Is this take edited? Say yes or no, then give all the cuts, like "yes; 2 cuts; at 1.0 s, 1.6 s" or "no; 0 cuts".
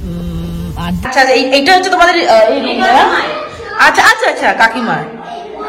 yes; 1 cut; at 1.1 s